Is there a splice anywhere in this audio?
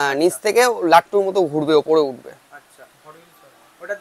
no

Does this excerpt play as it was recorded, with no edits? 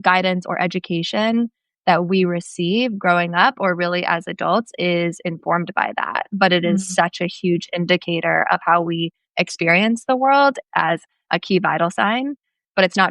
no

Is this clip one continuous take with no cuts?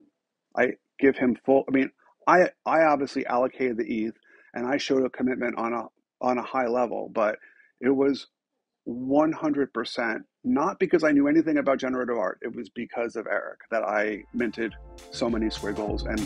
yes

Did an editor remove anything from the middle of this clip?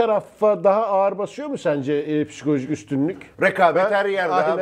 yes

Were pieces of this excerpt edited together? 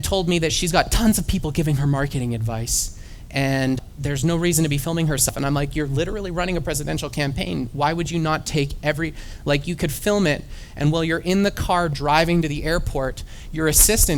yes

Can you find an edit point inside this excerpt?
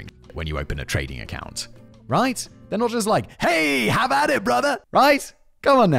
yes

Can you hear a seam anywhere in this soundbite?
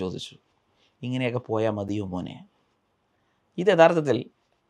no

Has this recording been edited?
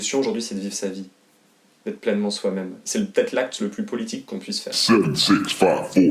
yes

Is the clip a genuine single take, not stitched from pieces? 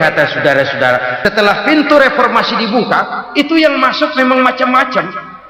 no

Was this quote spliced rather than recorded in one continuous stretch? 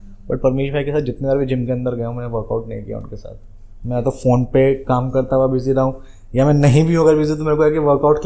no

